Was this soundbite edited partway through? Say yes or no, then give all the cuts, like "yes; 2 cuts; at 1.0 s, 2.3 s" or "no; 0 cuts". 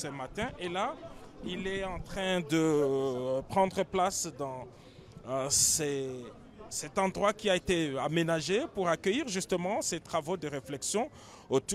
no; 0 cuts